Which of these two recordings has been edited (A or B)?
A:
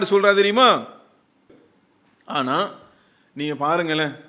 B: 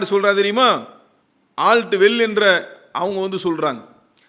A